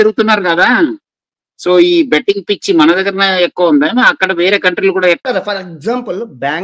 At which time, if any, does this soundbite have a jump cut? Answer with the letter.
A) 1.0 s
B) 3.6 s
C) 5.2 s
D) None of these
C